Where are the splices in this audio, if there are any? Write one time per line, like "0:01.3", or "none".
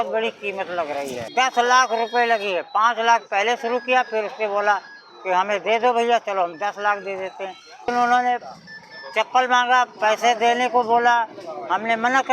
0:01.2
0:07.9